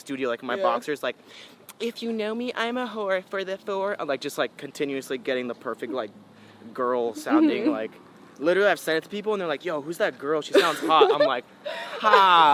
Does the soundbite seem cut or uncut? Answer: uncut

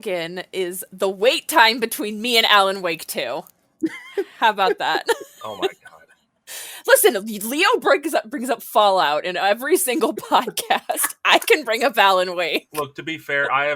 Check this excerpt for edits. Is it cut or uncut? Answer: uncut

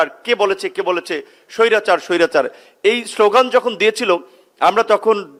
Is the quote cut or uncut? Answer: uncut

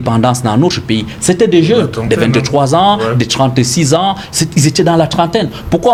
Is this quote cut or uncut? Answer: uncut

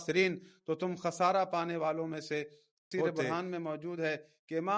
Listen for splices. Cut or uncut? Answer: cut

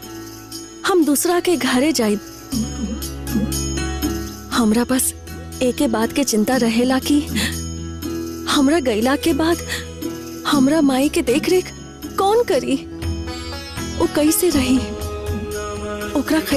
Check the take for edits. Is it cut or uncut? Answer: uncut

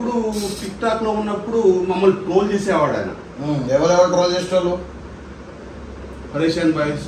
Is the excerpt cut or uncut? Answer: uncut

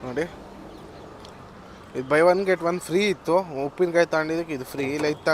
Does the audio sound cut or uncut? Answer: uncut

